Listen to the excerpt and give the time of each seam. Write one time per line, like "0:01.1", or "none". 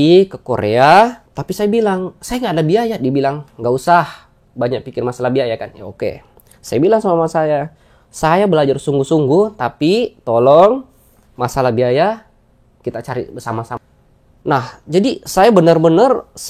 0:01.3
0:13.7